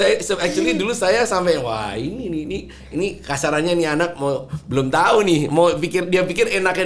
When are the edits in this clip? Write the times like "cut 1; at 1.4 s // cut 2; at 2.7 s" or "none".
none